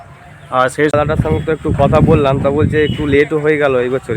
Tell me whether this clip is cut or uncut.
cut